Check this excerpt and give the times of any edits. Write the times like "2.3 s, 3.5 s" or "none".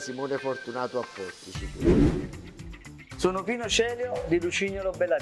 1.6 s, 2.7 s